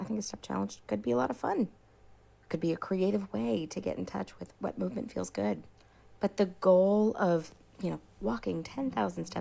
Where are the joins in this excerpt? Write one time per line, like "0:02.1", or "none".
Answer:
none